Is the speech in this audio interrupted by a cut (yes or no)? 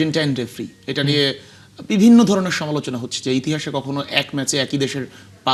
no